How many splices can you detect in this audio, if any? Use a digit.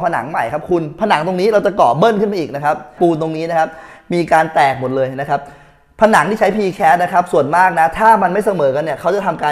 1